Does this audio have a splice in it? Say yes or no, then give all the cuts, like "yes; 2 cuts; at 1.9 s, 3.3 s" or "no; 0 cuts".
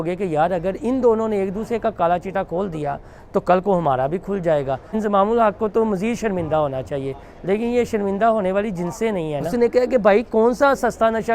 yes; 2 cuts; at 4.9 s, 9.5 s